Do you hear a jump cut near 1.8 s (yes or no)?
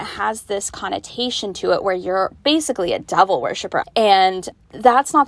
no